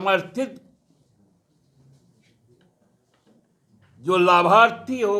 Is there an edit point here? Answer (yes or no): no